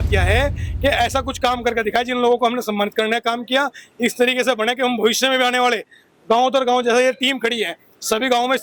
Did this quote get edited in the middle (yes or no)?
no